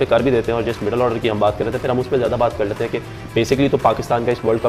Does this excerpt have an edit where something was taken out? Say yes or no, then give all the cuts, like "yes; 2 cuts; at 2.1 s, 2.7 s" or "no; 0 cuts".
no; 0 cuts